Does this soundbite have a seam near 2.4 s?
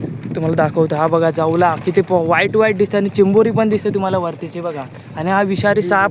no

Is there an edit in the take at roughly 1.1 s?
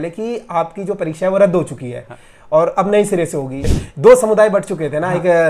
no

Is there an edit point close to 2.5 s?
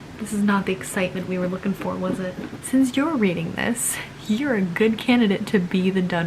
yes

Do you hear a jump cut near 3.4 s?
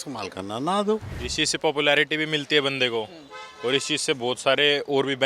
no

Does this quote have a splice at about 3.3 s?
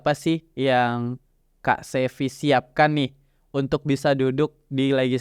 no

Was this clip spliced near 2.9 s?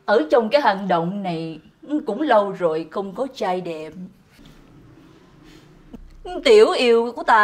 no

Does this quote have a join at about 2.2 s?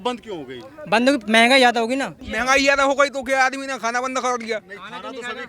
yes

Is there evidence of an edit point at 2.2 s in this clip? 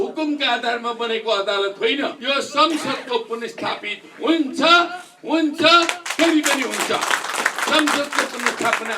yes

